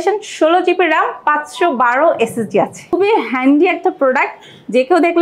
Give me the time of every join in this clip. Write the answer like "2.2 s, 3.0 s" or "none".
2.9 s